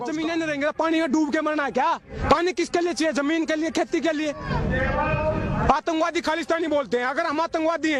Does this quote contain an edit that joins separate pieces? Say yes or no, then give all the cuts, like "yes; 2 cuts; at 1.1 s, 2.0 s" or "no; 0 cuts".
no; 0 cuts